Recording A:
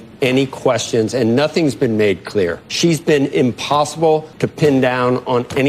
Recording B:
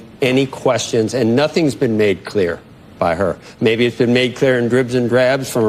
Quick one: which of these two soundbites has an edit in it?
A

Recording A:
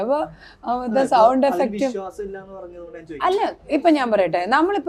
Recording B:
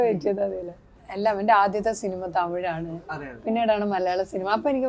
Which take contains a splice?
B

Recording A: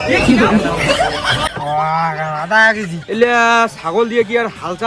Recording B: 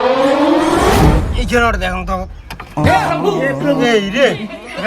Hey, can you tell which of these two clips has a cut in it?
B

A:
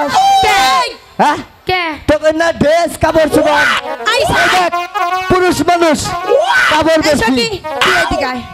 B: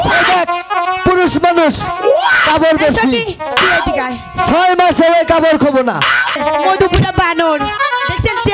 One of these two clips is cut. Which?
B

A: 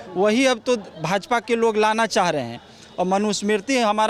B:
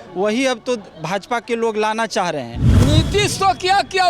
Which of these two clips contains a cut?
B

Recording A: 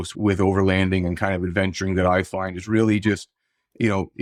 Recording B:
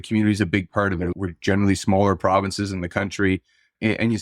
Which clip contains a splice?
B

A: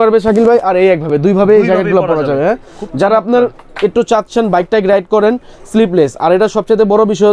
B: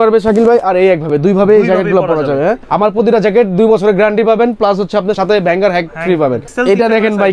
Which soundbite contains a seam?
B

